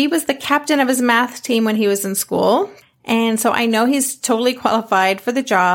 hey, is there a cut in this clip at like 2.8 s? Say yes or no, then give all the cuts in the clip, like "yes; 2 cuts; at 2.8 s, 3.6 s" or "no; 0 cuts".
yes; 1 cut; at 2.8 s